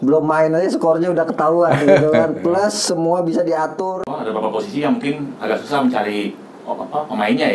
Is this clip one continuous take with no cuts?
no; 1 cut; at 4.0 s

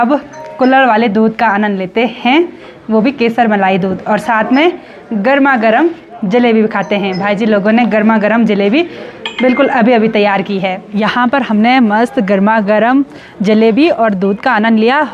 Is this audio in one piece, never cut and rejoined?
yes; 0 cuts

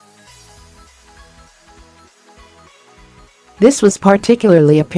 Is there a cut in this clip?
no; 0 cuts

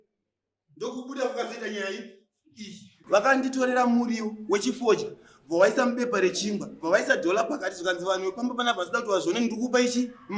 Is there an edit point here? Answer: yes; 1 cut; at 2.9 s

